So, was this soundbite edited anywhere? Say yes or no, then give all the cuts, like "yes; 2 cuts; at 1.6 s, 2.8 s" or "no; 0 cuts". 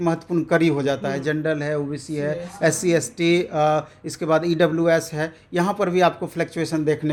no; 0 cuts